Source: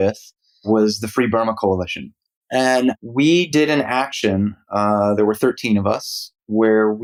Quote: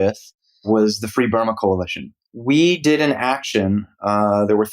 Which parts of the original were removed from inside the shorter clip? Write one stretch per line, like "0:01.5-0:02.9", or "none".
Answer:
0:02.4-0:03.0